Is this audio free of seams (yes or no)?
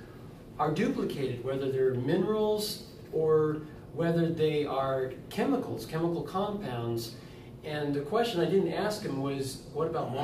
no